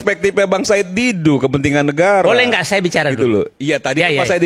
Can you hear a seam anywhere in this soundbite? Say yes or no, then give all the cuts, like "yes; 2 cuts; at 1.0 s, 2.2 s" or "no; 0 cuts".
no; 0 cuts